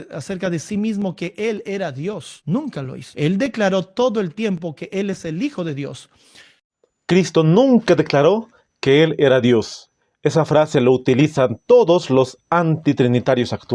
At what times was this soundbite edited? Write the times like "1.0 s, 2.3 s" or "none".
none